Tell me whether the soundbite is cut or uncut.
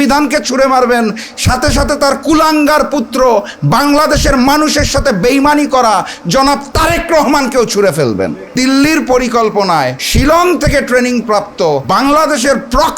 cut